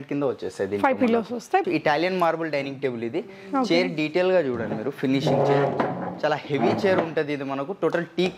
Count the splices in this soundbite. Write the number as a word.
one